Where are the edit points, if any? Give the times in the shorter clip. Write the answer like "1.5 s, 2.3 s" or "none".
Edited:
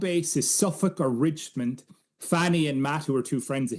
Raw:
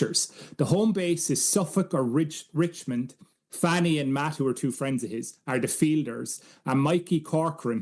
1.5 s